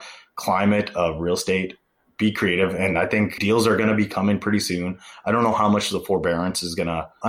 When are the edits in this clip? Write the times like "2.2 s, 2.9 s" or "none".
3.4 s